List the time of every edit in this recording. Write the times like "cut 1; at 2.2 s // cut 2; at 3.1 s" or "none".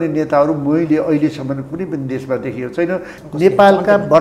cut 1; at 3.2 s